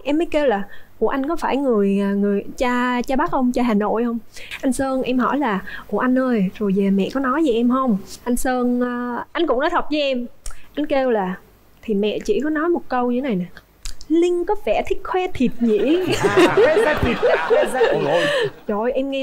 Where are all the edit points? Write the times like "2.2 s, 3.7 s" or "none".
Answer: 4.4 s